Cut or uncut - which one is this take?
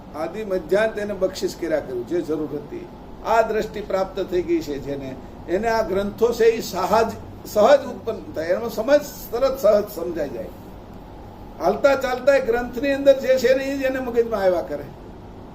cut